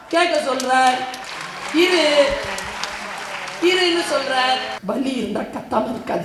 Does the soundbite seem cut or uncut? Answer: cut